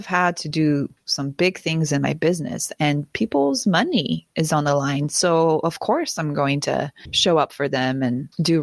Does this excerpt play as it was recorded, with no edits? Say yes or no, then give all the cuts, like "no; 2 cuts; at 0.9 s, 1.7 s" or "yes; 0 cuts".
no; 1 cut; at 7.0 s